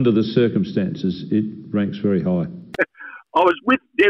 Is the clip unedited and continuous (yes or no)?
no